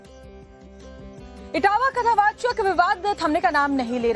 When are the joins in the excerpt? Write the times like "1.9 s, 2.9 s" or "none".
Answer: 1.3 s